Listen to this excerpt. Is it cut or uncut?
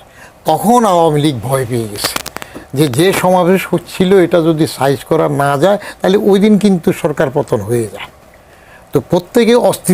uncut